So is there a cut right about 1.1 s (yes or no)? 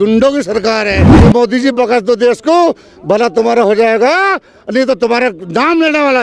yes